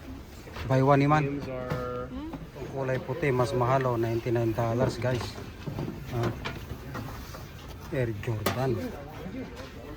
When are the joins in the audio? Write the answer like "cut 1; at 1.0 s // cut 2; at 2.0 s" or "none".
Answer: cut 1; at 2.5 s